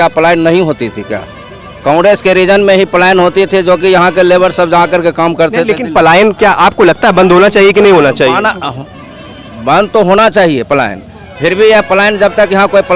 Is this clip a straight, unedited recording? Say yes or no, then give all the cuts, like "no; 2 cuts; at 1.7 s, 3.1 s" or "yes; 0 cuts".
yes; 0 cuts